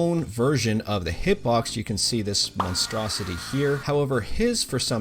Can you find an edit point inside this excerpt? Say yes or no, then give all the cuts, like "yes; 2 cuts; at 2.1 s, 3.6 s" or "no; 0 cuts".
yes; 1 cut; at 3.8 s